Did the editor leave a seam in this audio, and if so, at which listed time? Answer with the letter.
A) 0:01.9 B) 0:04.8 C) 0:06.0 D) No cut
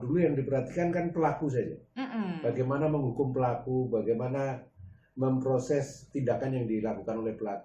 C